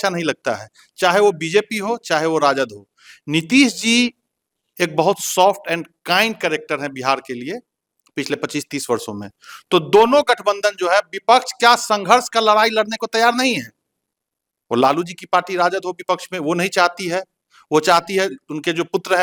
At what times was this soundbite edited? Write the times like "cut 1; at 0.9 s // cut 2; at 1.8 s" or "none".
none